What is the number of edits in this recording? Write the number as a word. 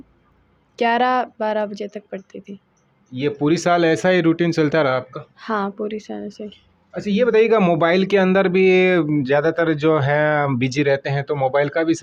zero